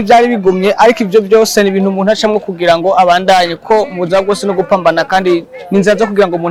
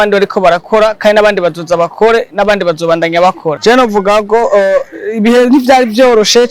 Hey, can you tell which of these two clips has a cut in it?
second; 1 cut; at 3.6 s

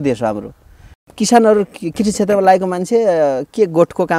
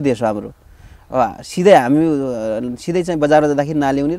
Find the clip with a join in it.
first; 1 cut; at 1.0 s

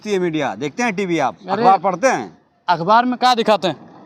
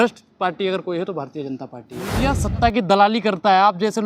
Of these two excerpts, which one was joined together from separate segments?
second; 1 cut; at 2.1 s

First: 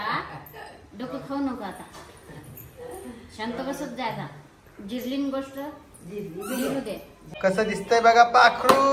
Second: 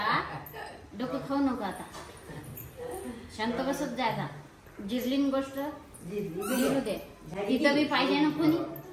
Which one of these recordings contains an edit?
first; 1 cut; at 7.2 s

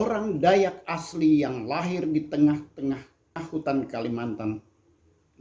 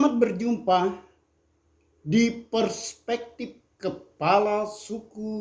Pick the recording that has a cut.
first; 1 cut; at 3.4 s

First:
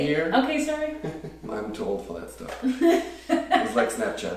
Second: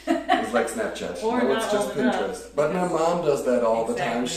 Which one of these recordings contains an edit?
first; 1 cut; at 1.5 s

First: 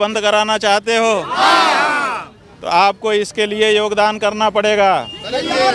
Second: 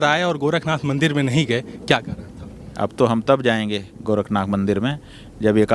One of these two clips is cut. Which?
second; 2 cuts; at 2.7 s, 4.9 s

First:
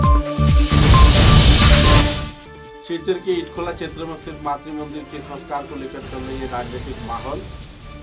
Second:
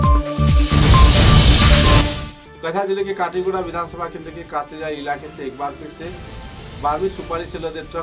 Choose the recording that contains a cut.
second; 1 cut; at 2.0 s

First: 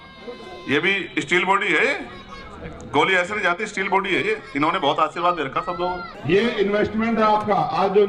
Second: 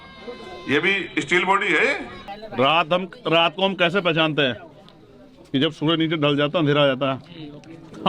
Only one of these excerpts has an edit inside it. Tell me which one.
second; 1 cut; at 2.4 s

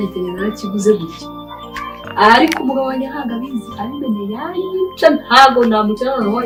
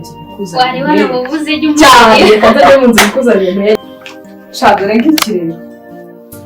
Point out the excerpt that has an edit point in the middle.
second; 1 cut; at 3.8 s

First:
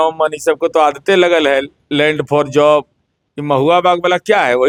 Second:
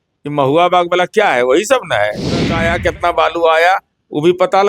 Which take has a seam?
second; 1 cut; at 2.6 s

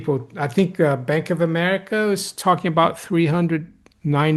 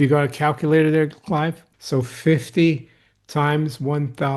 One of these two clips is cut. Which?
second; 1 cut; at 1.7 s

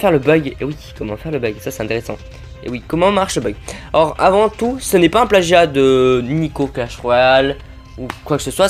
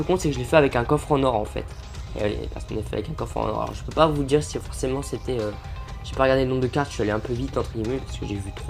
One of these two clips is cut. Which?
second; 1 cut; at 3.1 s

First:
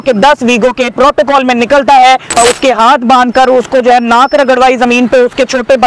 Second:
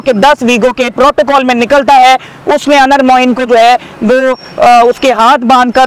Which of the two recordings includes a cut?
first; 1 cut; at 2.4 s

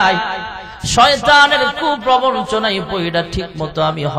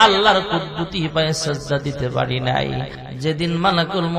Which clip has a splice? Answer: second; 1 cut; at 3.0 s

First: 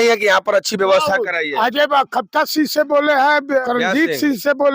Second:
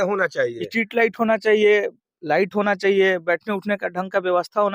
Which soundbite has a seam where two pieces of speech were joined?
first; 1 cut; at 3.6 s

